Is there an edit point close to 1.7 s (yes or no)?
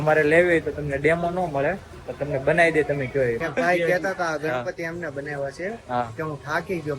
no